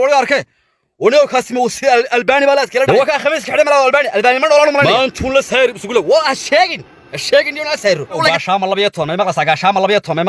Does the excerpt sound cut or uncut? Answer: cut